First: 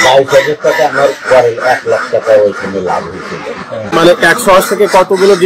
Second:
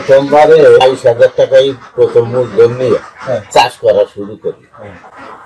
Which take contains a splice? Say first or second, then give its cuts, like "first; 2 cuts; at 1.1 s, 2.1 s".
first; 1 cut; at 3.9 s